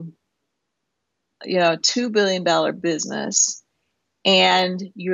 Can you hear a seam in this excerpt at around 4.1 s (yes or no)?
no